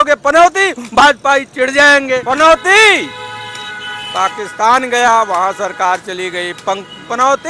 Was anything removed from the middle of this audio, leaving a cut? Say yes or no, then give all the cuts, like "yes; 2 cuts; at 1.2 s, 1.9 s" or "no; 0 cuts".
yes; 1 cut; at 2.2 s